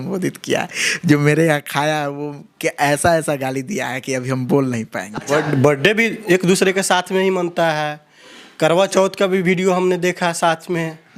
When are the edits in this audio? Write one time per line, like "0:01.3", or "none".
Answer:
0:05.2